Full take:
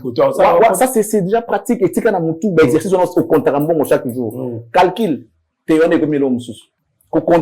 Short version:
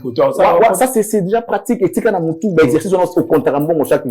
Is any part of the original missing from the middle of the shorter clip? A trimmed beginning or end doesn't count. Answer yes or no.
no